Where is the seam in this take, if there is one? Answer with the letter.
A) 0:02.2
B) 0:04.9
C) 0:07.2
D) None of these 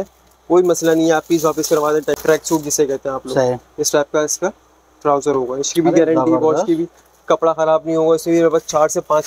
A